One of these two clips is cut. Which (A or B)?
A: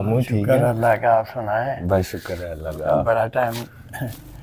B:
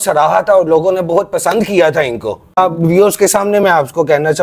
B